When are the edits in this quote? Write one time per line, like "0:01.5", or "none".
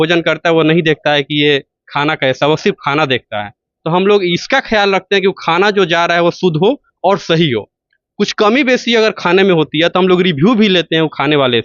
none